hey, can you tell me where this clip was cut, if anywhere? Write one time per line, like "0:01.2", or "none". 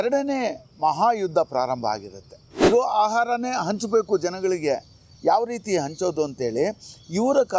0:02.6

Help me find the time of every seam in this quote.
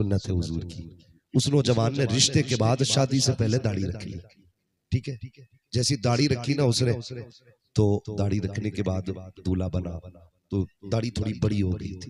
none

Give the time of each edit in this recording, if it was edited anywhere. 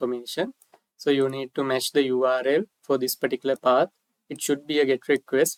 none

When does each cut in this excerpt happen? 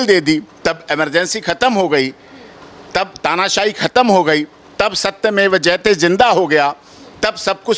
none

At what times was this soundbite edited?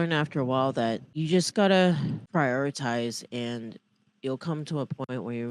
0:01.1
0:02.2

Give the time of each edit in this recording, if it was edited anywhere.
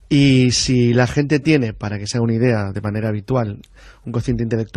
0:01.9

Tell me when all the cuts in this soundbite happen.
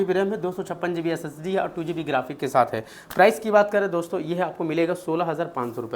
none

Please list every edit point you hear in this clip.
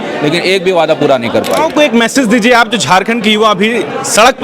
0:01.5

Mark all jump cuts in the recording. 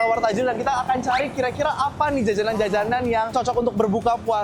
0:03.3

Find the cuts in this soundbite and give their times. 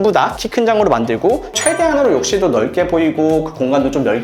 0:01.5

